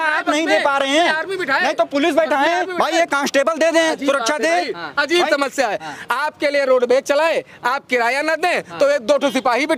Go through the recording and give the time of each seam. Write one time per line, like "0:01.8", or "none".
none